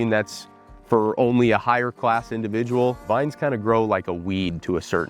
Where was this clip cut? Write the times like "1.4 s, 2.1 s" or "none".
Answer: 3.0 s